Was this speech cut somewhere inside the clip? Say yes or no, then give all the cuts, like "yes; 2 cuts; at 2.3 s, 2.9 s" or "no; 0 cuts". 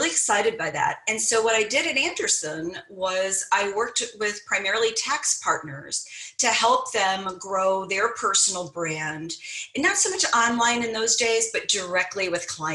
no; 0 cuts